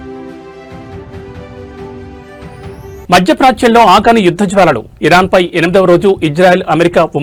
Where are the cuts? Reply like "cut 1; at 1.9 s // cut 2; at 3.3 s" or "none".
none